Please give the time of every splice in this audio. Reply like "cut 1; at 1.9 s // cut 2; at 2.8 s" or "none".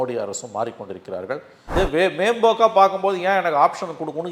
cut 1; at 1.8 s